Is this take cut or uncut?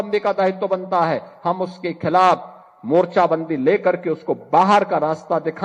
uncut